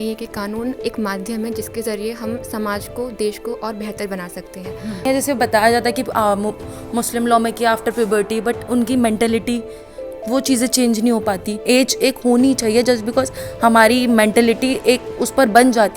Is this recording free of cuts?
no; 2 cuts; at 5.0 s, 11.5 s

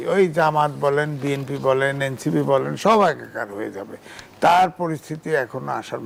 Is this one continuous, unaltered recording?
yes; 0 cuts

